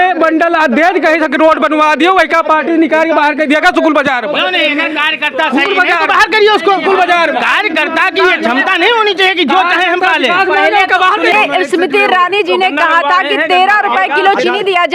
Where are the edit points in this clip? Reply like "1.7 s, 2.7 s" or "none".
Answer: 11.3 s